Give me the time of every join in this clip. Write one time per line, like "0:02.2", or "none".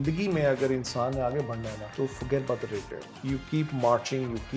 0:01.8
0:03.1